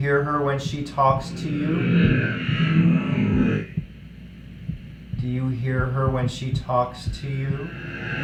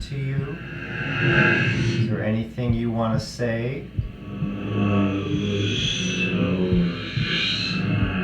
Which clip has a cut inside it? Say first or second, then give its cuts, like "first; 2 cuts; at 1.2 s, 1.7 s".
second; 1 cut; at 2.2 s